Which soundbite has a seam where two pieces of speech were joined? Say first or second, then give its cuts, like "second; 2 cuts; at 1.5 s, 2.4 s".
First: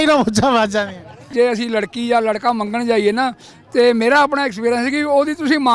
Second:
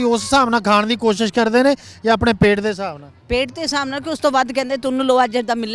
first; 1 cut; at 1.3 s